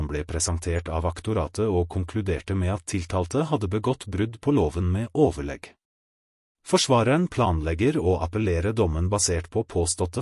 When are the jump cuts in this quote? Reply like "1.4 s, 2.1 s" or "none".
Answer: none